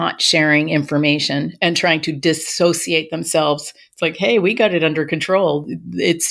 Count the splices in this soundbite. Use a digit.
0